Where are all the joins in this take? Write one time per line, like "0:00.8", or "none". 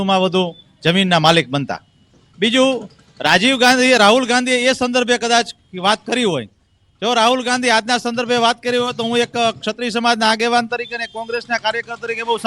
0:11.1